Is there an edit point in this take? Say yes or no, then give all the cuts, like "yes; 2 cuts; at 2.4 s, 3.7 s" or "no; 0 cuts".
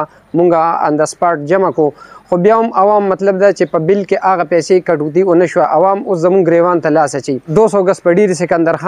yes; 1 cut; at 7.5 s